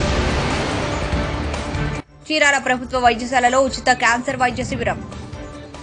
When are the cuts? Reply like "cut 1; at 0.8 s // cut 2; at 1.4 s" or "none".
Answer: cut 1; at 2.1 s